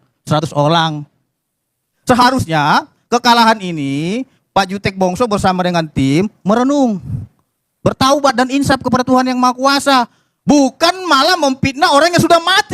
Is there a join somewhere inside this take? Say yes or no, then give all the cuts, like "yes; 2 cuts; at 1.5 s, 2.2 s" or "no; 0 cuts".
yes; 1 cut; at 1.9 s